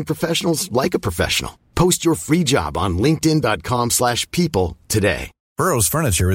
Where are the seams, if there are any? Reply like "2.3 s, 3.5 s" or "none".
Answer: 5.3 s